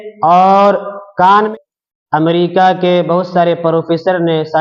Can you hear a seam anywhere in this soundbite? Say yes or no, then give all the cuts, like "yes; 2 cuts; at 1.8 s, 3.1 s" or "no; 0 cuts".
yes; 1 cut; at 1.5 s